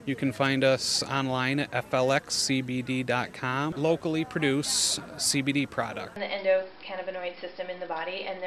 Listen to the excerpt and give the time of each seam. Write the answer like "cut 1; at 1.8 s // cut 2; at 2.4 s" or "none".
cut 1; at 3.7 s // cut 2; at 6.2 s

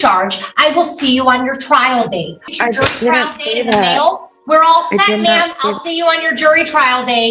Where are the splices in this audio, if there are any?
cut 1; at 2.5 s

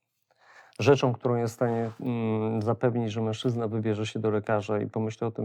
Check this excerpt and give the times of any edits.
none

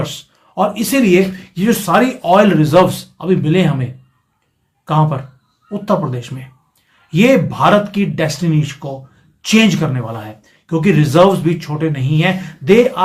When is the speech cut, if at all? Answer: none

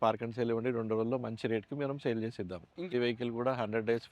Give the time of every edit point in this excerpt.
cut 1; at 2.9 s

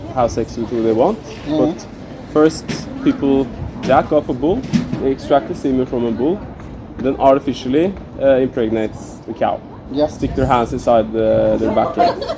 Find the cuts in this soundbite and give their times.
none

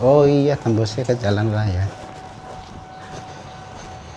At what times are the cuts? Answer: none

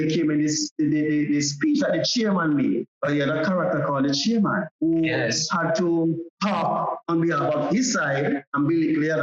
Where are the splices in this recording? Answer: cut 1; at 2.9 s

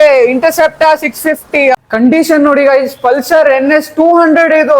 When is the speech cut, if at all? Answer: cut 1; at 1.7 s

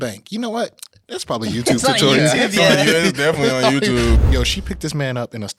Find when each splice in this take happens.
cut 1; at 4.2 s

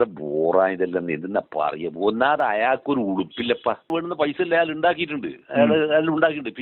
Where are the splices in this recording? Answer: cut 1; at 3.9 s

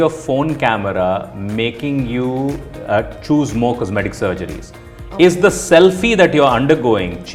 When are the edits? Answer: none

